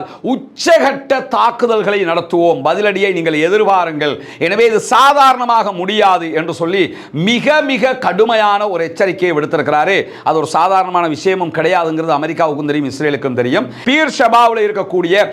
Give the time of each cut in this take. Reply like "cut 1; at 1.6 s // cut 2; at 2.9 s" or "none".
cut 1; at 13.7 s